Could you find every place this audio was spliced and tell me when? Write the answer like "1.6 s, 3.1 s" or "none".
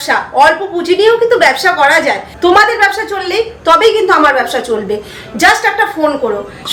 2.3 s